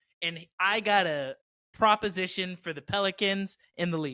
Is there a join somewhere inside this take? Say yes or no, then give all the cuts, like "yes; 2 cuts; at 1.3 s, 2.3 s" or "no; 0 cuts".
no; 0 cuts